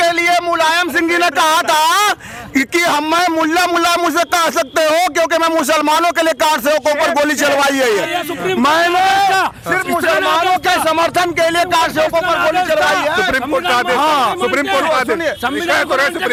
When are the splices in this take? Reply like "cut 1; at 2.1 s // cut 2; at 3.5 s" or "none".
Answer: none